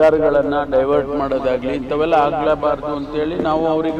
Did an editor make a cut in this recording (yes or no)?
no